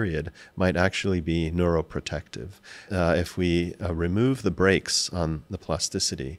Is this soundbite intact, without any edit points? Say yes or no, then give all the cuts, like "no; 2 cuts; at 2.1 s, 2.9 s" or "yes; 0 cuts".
no; 1 cut; at 2.8 s